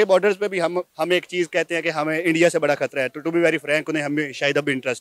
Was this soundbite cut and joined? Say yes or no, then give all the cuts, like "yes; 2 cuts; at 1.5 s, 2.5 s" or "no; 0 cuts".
no; 0 cuts